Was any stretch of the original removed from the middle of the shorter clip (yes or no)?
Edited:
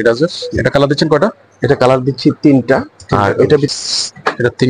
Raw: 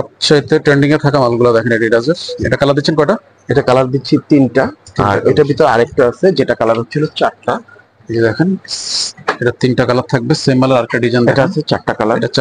yes